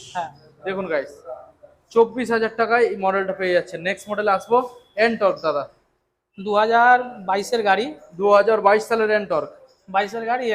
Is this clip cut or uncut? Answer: uncut